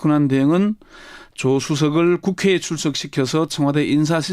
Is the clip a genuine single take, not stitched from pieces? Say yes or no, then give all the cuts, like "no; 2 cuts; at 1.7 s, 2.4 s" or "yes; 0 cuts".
yes; 0 cuts